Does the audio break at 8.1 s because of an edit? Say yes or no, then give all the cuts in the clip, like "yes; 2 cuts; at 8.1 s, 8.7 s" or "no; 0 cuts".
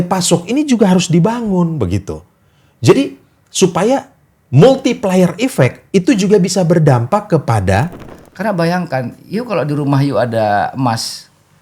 yes; 1 cut; at 8.1 s